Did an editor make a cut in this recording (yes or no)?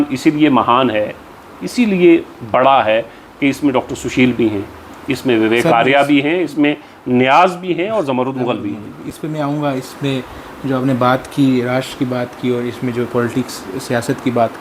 no